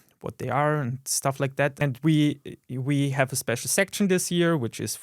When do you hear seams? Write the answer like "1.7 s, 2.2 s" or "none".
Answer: 1.8 s